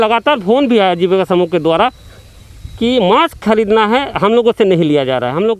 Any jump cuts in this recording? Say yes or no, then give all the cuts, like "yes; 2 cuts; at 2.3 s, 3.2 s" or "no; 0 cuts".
no; 0 cuts